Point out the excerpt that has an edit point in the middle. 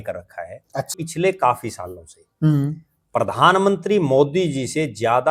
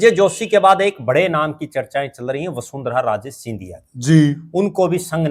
first; 1 cut; at 0.9 s

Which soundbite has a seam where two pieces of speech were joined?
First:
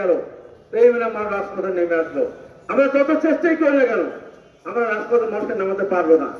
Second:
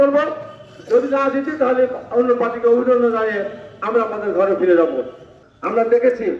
second; 1 cut; at 5.2 s

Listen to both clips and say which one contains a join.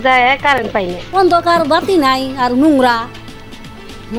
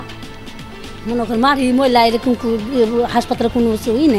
first; 1 cut; at 1.0 s

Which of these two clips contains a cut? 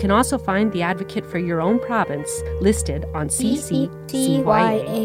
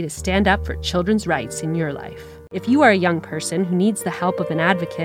second; 1 cut; at 2.6 s

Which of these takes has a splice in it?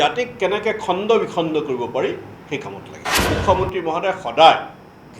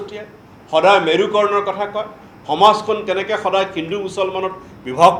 first; 1 cut; at 3.1 s

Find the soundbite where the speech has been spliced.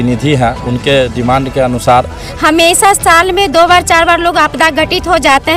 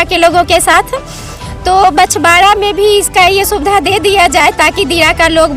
first; 1 cut; at 2.3 s

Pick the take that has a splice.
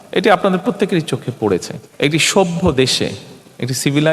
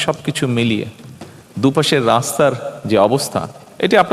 first; 1 cut; at 1.8 s

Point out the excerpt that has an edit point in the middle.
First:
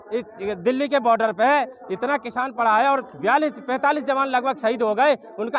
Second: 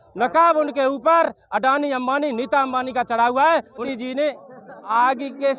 second; 2 cuts; at 3.9 s, 4.9 s

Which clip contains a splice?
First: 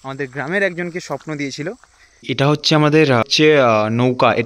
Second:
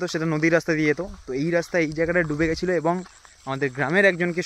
first; 2 cuts; at 2.2 s, 3.2 s

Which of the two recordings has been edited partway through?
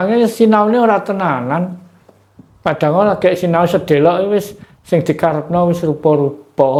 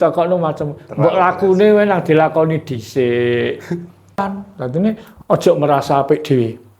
second; 1 cut; at 4.2 s

